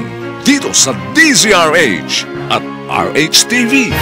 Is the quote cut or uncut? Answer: uncut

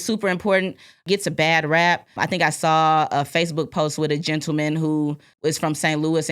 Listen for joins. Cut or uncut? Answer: cut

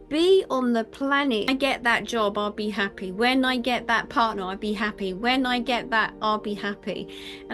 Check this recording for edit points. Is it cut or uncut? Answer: cut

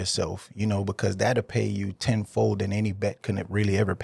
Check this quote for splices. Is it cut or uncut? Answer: uncut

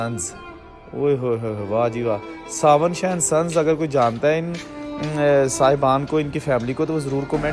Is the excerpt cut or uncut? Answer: uncut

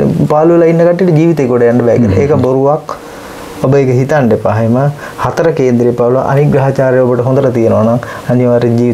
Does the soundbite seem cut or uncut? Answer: uncut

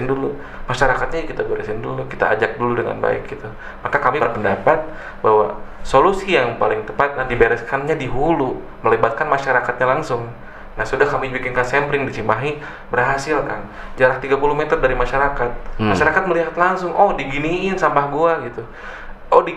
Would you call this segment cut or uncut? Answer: cut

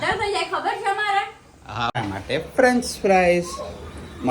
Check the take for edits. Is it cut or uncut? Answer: cut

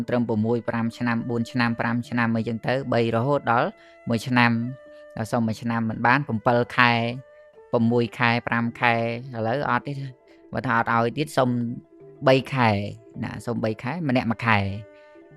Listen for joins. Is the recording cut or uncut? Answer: uncut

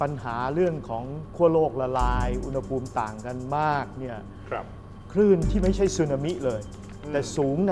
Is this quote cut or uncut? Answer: uncut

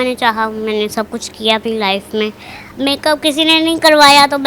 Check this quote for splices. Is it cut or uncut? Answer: uncut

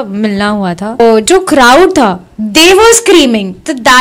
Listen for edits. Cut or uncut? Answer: cut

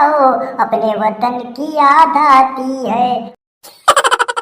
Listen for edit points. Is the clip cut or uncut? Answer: cut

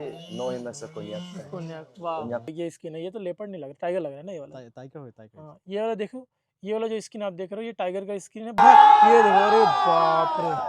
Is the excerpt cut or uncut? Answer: cut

